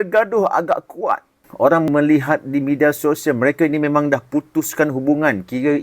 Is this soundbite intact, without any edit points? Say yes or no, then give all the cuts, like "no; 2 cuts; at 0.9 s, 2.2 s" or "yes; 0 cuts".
no; 1 cut; at 1.9 s